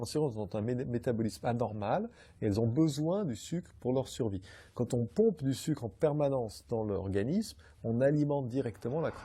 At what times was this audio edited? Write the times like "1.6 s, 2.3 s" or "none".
none